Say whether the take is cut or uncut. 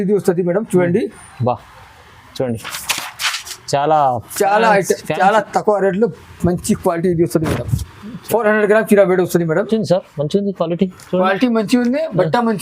cut